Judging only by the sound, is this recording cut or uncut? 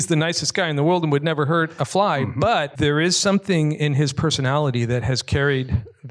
cut